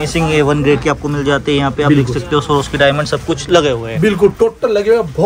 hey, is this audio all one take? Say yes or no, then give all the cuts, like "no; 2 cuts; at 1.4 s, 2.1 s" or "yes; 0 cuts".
yes; 0 cuts